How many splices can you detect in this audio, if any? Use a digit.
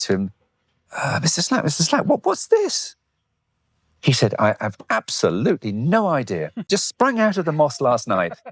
1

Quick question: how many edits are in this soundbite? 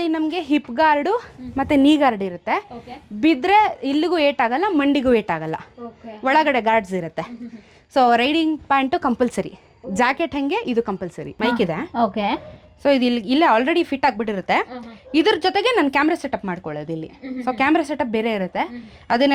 1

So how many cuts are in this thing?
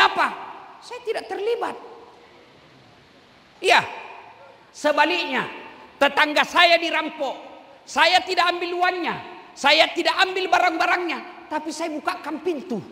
0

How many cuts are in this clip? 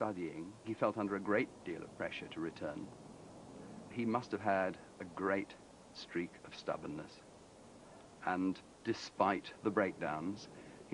1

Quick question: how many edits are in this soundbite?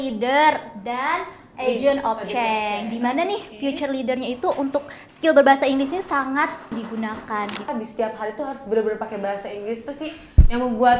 2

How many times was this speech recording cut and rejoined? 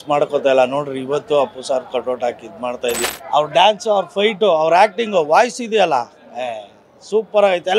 1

